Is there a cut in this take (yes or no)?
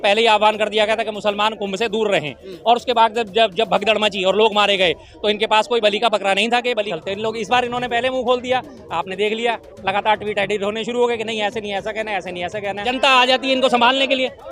yes